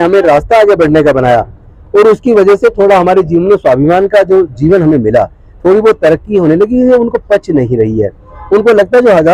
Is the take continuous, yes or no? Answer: yes